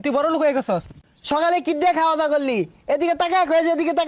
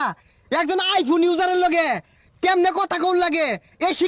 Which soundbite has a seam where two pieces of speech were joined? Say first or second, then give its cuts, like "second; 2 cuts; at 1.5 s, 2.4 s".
first; 1 cut; at 0.9 s